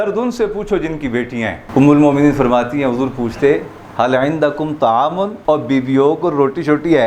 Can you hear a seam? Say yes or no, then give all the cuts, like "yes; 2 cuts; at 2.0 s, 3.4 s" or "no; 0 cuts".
yes; 2 cuts; at 1.6 s, 5.3 s